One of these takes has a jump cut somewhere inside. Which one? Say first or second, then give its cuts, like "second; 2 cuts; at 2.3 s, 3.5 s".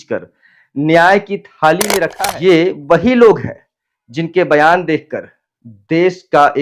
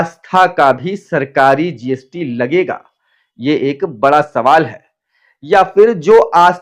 first; 1 cut; at 2.1 s